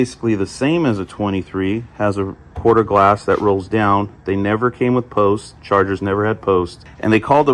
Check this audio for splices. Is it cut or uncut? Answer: uncut